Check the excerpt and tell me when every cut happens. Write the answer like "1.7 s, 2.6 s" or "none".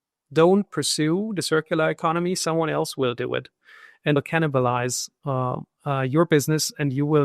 4.2 s